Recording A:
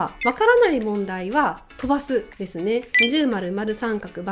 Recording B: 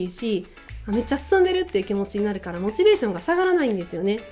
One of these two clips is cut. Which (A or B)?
A